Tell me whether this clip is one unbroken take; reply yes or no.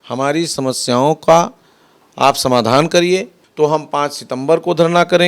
no